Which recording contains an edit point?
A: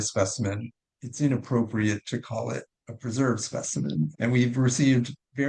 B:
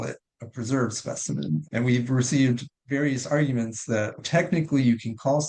B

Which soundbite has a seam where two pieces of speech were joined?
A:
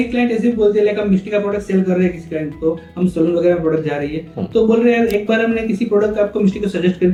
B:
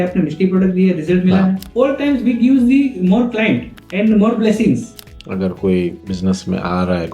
B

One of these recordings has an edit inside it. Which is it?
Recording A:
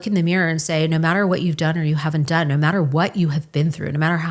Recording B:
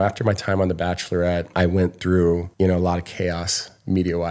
B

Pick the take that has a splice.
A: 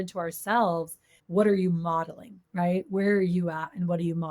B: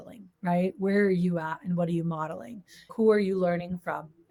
A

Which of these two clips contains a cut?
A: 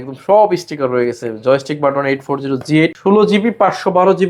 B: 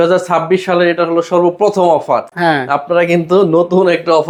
A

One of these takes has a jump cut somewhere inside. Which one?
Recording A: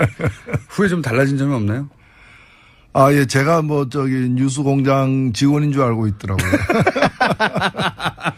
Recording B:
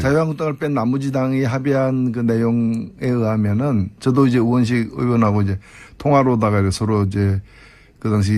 B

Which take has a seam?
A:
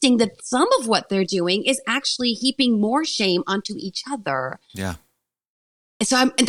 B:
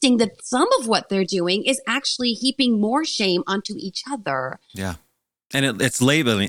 B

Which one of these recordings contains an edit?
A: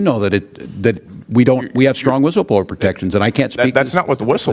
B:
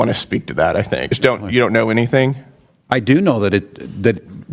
B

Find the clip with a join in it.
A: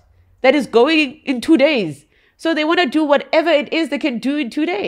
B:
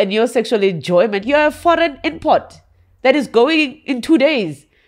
B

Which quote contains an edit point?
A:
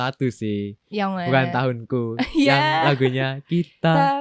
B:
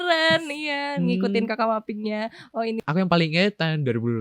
B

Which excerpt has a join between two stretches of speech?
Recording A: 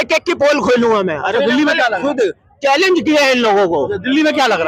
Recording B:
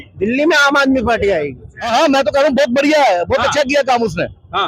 B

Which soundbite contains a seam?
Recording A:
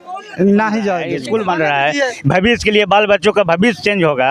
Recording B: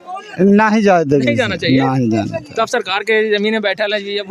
A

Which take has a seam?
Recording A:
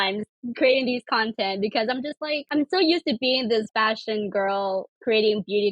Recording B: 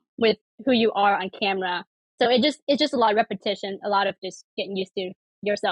A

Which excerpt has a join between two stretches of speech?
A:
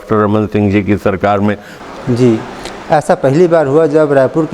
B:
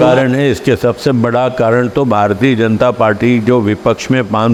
A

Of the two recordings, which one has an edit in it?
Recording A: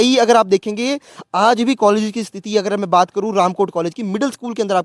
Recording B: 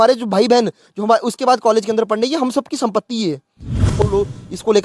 B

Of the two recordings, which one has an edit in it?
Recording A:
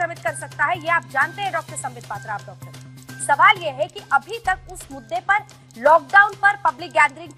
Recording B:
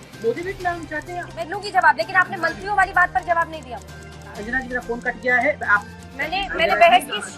B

